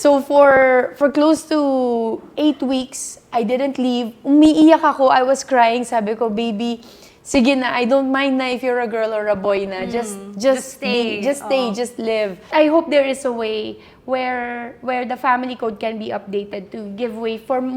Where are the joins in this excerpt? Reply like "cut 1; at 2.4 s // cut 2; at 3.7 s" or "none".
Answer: cut 1; at 12.4 s

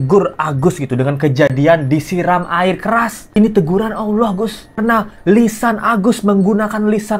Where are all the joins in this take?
none

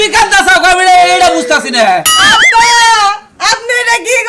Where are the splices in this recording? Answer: none

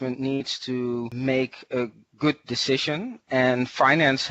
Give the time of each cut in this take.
cut 1; at 1.1 s

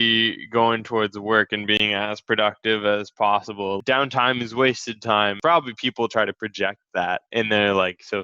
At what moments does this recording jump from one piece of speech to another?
cut 1; at 3.8 s // cut 2; at 5.3 s

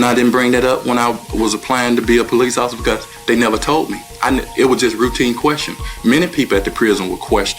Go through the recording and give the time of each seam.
cut 1; at 2.3 s

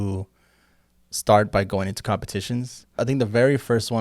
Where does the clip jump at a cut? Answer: cut 1; at 3.0 s

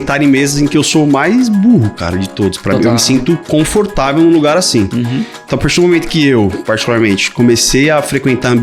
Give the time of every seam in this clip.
none

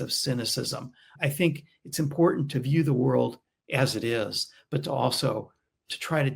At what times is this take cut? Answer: cut 1; at 1.1 s

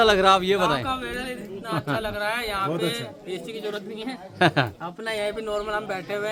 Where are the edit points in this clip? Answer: none

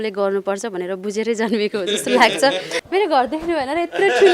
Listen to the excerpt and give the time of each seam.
cut 1; at 2.7 s

